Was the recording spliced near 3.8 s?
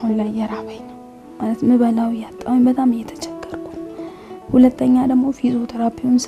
no; 0 cuts

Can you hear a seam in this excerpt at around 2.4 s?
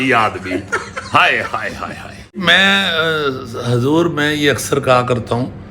yes; 1 cut; at 2.4 s

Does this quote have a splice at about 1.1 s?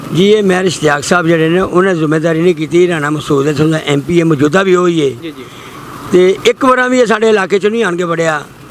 no; 0 cuts

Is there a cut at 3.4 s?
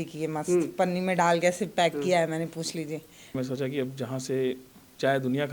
yes; 1 cut; at 3.4 s

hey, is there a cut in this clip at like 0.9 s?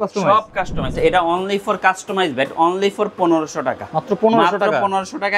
yes; 1 cut; at 0.9 s

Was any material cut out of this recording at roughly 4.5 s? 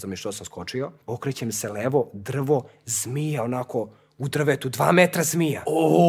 no; 1 cut; at 1.0 s

